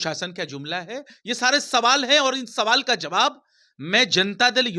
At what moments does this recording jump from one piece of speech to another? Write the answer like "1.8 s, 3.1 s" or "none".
none